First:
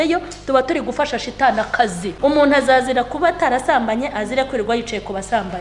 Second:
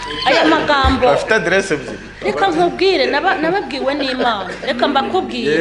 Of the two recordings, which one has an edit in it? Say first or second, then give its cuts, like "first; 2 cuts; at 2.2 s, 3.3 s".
first; 1 cut; at 2.1 s